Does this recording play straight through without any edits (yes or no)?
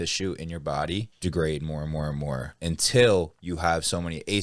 no